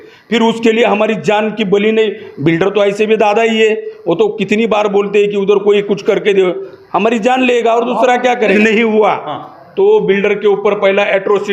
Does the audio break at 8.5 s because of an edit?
yes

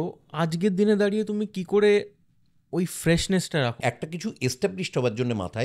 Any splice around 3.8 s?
yes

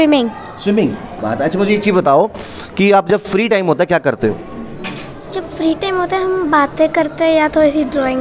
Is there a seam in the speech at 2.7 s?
no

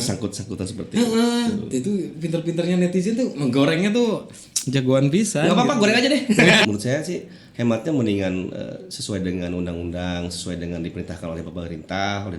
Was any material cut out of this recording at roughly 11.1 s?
no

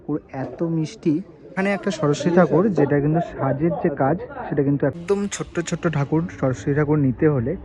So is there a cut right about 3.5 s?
no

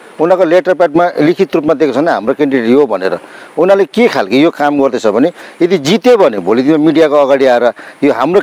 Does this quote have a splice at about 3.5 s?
no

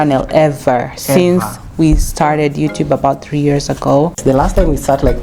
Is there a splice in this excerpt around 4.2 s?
yes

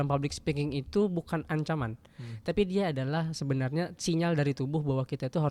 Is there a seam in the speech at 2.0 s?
no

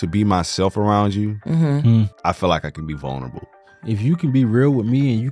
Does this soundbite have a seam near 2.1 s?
yes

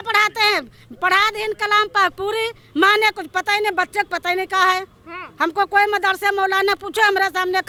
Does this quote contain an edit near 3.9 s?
no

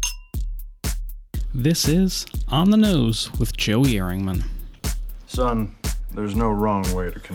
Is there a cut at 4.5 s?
no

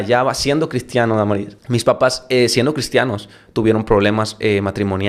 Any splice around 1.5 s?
yes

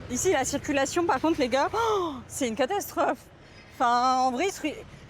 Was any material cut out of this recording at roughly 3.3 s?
no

